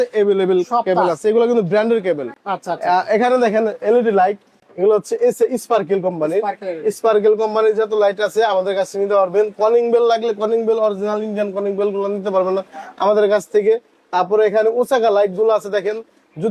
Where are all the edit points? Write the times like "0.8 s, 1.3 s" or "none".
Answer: none